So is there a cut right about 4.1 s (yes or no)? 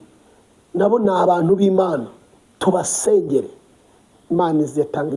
yes